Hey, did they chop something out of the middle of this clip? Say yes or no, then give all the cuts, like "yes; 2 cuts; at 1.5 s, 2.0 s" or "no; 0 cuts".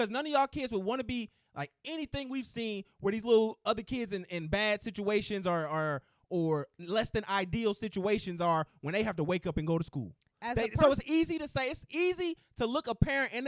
no; 0 cuts